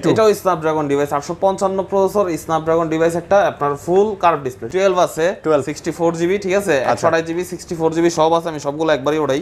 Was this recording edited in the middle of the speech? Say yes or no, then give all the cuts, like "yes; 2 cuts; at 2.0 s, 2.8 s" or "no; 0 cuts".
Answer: yes; 1 cut; at 4.6 s